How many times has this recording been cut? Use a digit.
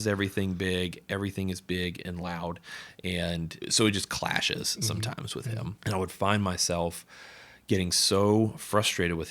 2